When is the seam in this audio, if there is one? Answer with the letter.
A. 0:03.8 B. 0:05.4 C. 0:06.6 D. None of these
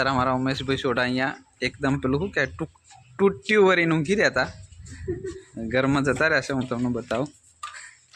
D